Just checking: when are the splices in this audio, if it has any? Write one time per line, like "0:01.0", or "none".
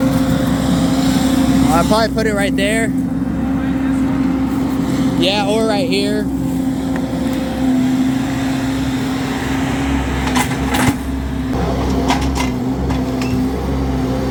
none

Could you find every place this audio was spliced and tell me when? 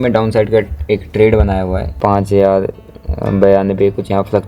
0:01.8

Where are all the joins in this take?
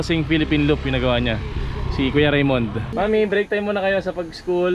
none

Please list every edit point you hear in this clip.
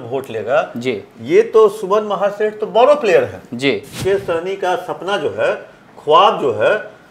0:03.9

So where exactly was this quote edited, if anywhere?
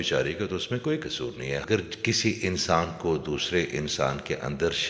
0:01.6

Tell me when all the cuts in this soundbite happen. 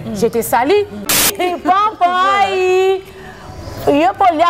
0:01.3

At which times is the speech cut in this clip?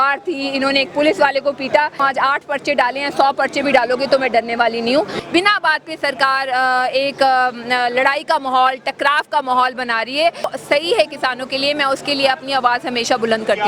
0:01.9
0:05.2
0:10.5

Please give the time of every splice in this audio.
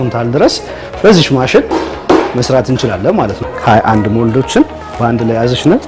0:03.4

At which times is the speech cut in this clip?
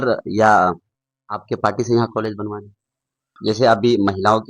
0:03.4

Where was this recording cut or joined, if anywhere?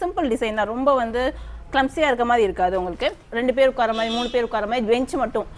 0:03.2

